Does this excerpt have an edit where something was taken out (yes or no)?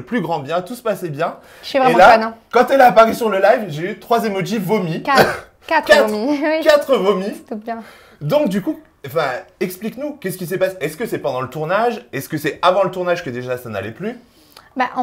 no